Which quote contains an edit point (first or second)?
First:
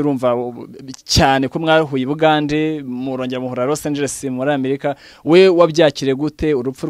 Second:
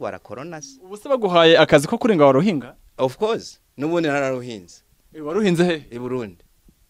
second